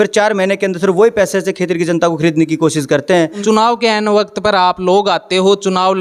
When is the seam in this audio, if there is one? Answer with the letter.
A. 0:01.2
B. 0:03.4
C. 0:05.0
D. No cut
B